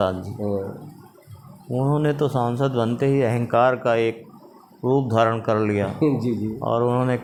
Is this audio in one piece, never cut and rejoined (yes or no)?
yes